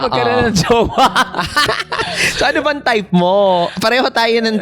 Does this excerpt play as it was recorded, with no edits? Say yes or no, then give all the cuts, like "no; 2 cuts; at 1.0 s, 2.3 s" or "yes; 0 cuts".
no; 1 cut; at 1.6 s